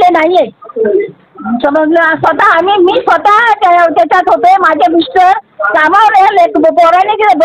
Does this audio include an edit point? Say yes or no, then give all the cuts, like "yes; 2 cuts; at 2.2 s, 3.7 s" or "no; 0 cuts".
no; 0 cuts